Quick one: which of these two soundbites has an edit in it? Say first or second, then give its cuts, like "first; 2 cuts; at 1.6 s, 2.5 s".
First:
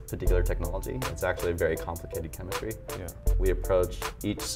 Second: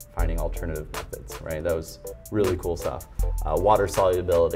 first; 1 cut; at 3.2 s